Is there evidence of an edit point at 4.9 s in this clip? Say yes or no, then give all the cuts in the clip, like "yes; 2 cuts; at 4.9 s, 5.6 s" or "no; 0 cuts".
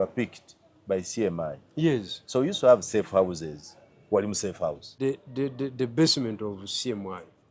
yes; 1 cut; at 4.9 s